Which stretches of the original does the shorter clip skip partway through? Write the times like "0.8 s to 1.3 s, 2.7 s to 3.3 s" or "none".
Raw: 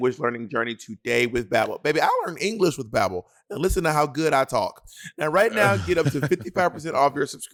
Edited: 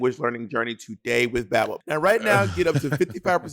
1.8 s to 5.1 s